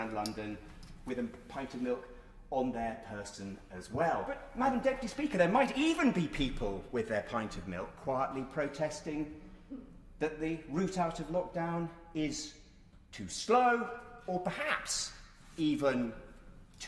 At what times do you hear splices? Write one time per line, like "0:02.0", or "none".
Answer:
none